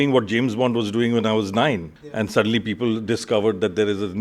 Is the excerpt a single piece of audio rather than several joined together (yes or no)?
no